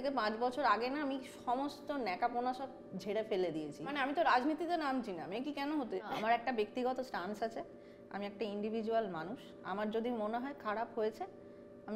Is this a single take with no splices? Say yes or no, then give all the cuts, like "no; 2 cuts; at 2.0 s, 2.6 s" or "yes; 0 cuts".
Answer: no; 2 cuts; at 3.9 s, 6.1 s